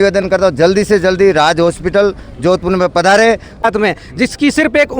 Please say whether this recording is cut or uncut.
cut